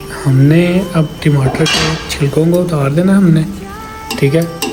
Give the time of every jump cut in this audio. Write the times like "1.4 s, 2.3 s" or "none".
none